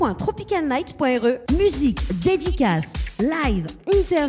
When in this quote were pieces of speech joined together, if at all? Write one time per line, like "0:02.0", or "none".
0:01.4

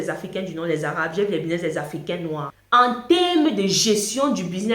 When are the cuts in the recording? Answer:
0:02.5

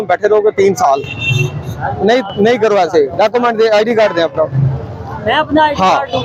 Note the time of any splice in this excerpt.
none

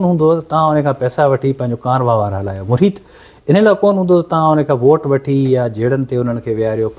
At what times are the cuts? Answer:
none

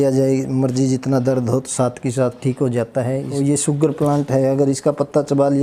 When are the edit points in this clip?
0:03.3

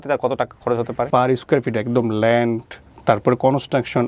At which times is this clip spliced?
0:01.1

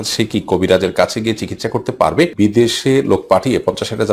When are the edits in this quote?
0:02.3

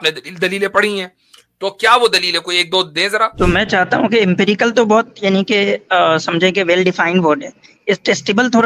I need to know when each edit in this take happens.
0:03.3

